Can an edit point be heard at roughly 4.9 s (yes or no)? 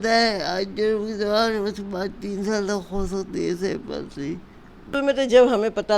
yes